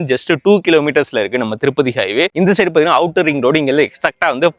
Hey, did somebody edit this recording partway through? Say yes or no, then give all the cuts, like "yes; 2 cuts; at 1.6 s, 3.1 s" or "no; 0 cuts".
no; 0 cuts